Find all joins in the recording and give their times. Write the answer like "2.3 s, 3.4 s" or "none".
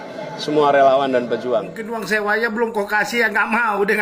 1.8 s